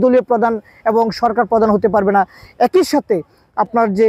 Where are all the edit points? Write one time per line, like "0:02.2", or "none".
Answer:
none